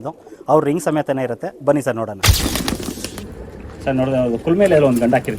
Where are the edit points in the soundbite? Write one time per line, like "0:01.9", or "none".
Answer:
0:02.4

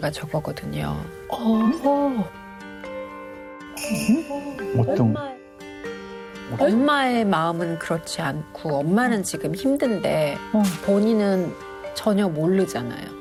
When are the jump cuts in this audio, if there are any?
none

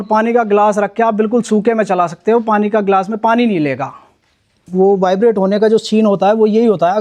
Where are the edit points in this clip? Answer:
0:04.6

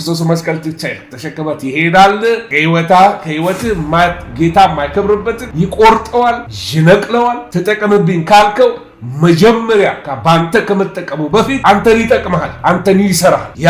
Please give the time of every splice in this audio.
none

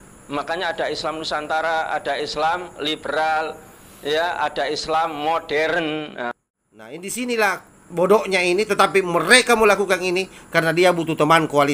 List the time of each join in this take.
0:06.3

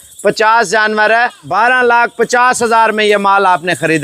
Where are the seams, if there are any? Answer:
0:01.5

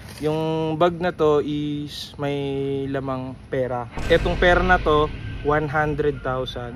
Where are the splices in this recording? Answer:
0:03.9

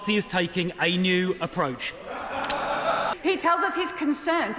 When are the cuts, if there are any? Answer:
0:03.1

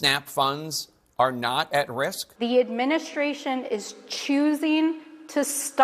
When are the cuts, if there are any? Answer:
0:02.2

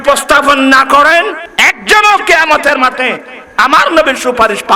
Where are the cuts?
none

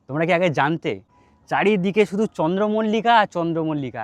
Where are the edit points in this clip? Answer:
none

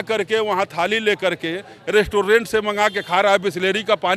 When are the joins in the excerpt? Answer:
none

